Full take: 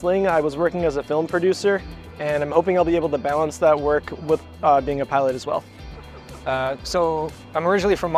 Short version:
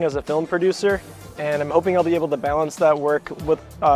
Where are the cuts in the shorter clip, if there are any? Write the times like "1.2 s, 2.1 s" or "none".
none